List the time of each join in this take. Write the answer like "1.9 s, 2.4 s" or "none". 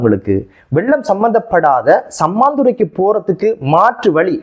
none